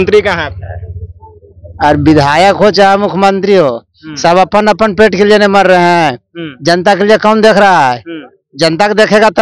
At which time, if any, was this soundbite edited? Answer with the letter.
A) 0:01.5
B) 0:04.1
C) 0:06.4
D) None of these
D